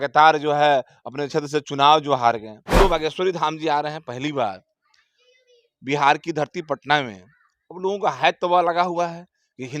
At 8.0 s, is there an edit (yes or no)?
no